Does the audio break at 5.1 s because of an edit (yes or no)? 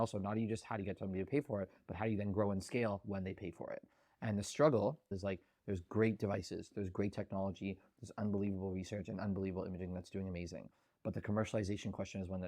yes